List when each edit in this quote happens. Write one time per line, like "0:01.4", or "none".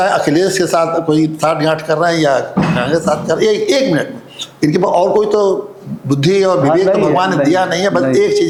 none